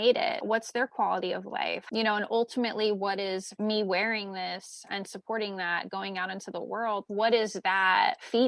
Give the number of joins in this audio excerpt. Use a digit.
1